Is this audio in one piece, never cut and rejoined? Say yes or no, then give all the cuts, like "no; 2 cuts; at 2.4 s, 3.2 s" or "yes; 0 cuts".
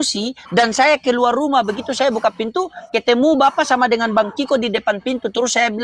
yes; 0 cuts